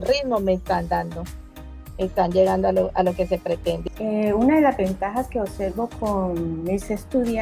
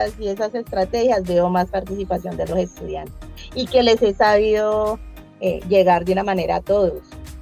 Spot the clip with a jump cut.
first; 1 cut; at 3.9 s

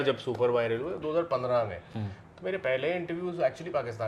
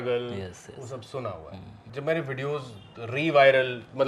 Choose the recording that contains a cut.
second; 1 cut; at 1.9 s

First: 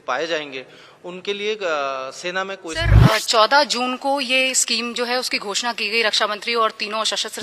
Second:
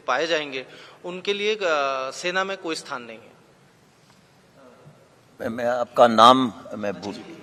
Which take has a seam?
first; 1 cut; at 3.0 s

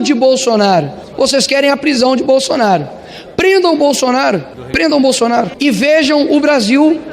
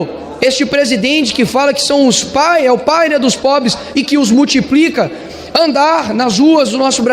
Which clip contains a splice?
first; 3 cuts; at 1.0 s, 4.6 s, 5.5 s

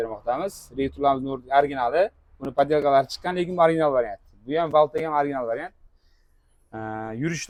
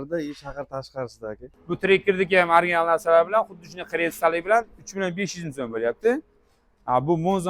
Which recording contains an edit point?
second; 1 cut; at 1.5 s

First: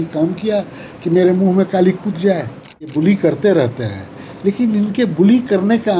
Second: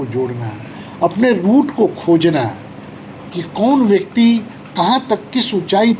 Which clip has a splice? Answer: first; 1 cut; at 2.9 s

